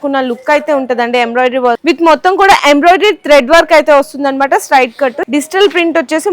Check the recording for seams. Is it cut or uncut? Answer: cut